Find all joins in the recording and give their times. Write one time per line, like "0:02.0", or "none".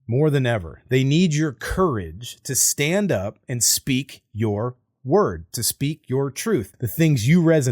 0:06.8